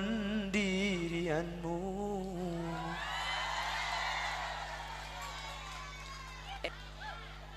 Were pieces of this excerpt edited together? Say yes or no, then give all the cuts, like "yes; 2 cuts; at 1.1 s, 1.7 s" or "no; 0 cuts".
yes; 1 cut; at 6.6 s